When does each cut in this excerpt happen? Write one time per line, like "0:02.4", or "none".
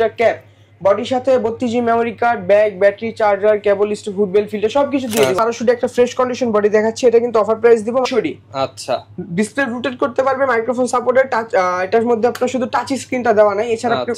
0:05.4
0:08.1